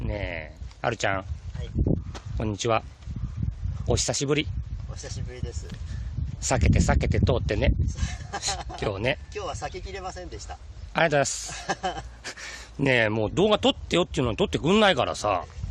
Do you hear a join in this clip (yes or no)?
yes